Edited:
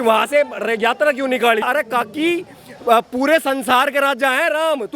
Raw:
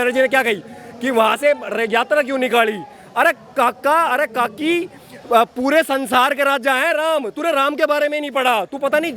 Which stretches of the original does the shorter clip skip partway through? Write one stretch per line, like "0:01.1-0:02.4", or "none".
0:02.8-0:04.1